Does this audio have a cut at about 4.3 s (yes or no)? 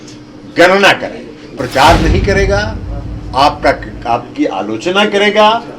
no